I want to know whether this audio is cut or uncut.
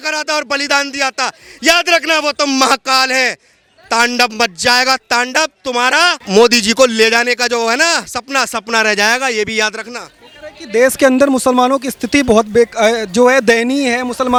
uncut